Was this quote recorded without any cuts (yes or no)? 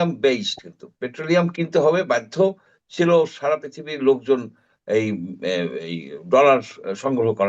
yes